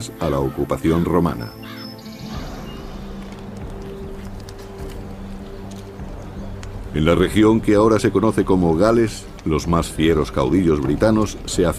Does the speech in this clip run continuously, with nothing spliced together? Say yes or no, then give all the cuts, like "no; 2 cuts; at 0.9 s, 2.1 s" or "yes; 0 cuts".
yes; 0 cuts